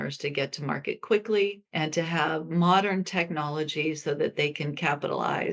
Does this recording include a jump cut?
yes; 1 cut; at 1.6 s

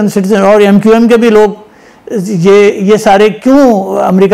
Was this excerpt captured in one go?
yes; 0 cuts

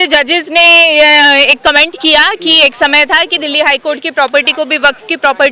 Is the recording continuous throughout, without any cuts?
yes; 0 cuts

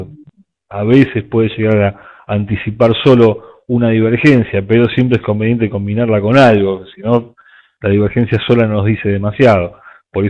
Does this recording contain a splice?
no; 0 cuts

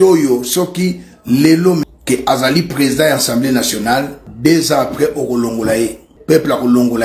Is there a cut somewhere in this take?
yes; 3 cuts; at 1.9 s, 4.2 s, 6.1 s

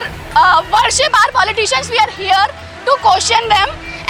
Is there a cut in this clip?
no; 0 cuts

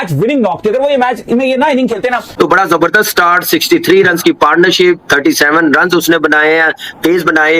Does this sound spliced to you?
yes; 1 cut; at 2.3 s

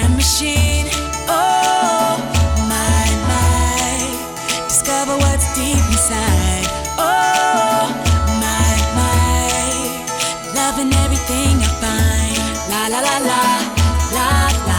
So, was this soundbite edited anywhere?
no; 0 cuts

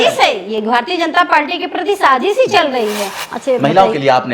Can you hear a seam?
yes; 1 cut; at 3.0 s

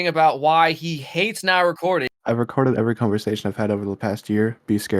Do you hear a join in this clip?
yes; 1 cut; at 2.1 s

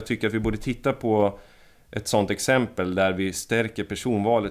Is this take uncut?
yes; 0 cuts

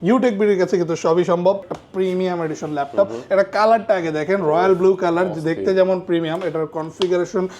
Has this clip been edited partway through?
yes; 1 cut; at 1.6 s

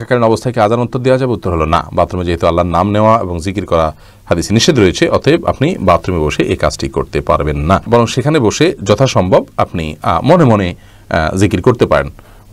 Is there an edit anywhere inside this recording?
no; 0 cuts

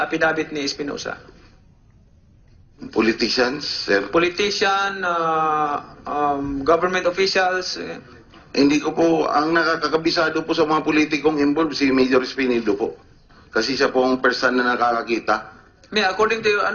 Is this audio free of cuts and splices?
no; 1 cut; at 12.5 s

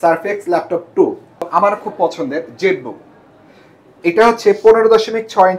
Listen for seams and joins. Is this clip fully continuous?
no; 1 cut; at 1.4 s

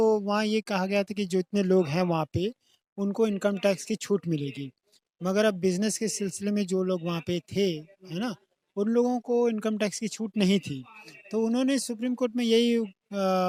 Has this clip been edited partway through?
no; 0 cuts

